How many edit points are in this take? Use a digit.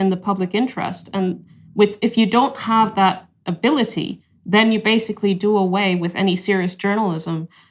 0